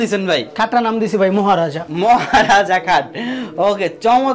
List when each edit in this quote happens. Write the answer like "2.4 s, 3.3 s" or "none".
none